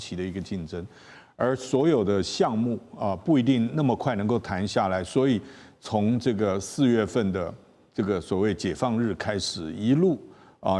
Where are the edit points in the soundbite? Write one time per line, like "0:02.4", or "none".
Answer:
none